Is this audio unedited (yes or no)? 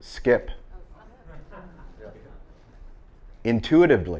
yes